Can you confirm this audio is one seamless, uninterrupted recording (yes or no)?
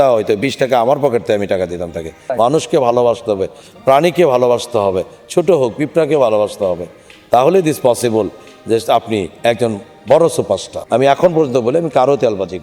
no